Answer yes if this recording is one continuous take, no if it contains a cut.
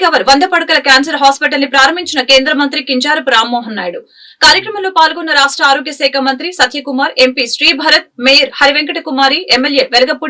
yes